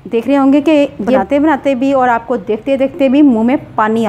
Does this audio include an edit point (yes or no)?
yes